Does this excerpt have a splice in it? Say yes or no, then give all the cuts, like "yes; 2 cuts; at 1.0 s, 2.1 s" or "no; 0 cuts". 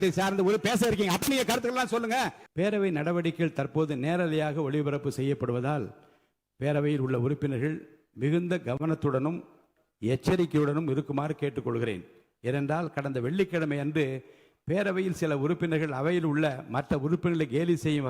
yes; 1 cut; at 2.4 s